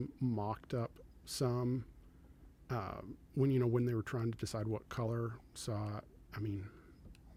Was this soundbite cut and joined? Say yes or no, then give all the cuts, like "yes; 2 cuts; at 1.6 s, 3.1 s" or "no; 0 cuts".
no; 0 cuts